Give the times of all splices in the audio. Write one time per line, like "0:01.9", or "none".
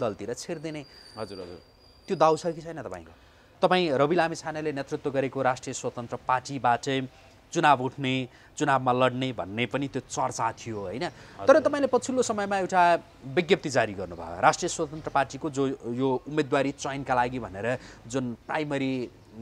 0:03.5